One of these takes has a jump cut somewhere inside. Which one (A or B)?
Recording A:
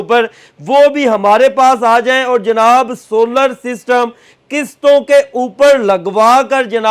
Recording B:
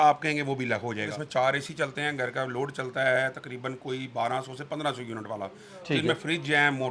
B